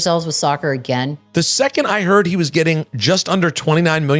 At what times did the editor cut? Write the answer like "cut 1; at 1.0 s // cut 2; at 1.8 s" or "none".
cut 1; at 1.2 s // cut 2; at 2.9 s